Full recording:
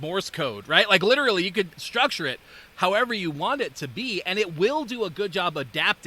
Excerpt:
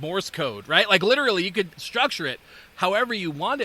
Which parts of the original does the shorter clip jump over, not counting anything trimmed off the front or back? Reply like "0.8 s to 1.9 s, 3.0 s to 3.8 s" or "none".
none

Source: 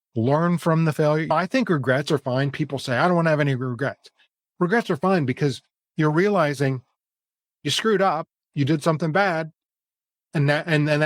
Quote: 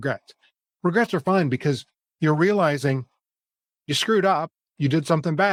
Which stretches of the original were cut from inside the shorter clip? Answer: none

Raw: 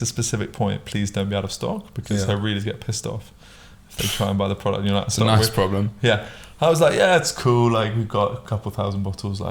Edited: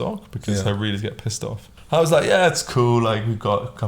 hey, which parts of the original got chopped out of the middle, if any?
3.3 s to 6.4 s

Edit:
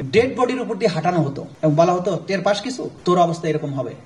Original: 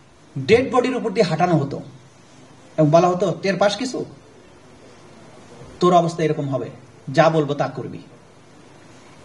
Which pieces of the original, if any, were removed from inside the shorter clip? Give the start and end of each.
1.8 s to 2.6 s, 4.0 s to 5.6 s

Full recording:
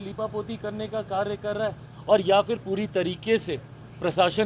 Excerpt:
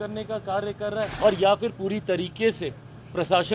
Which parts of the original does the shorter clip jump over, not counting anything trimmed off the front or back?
1.8 s to 2.0 s

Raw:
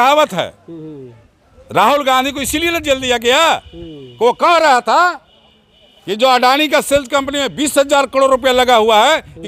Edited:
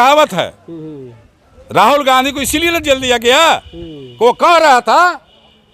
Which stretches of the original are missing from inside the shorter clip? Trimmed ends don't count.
none

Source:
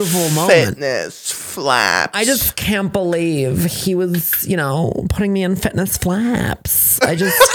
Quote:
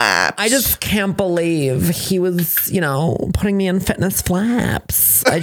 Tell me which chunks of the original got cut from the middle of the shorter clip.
none

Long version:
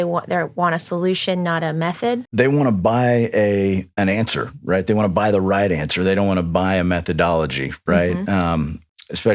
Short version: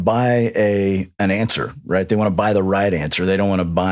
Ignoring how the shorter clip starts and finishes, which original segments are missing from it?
none

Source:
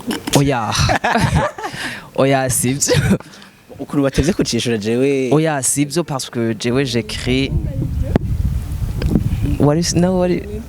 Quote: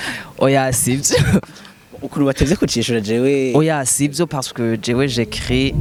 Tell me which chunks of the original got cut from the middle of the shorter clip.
none

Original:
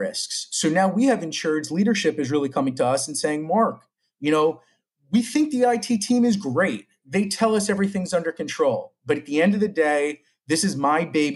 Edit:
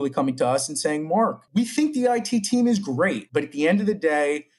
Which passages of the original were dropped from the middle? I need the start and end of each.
3.8 s to 5.0 s, 6.8 s to 9.0 s

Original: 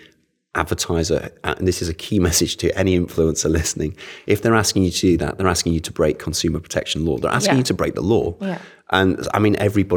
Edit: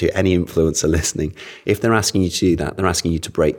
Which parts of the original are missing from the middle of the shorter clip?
none

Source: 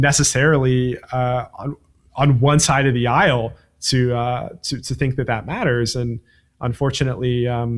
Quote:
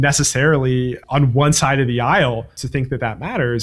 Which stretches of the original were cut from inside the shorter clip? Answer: 1.0 s to 2.1 s, 3.6 s to 4.8 s

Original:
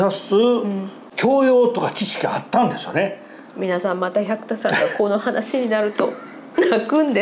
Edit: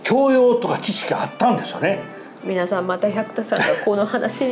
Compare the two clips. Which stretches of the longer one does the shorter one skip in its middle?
none

